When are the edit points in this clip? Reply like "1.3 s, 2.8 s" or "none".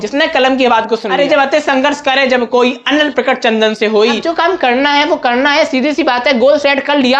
1.1 s, 4.2 s